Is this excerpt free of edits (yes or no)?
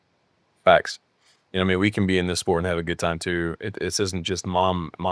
yes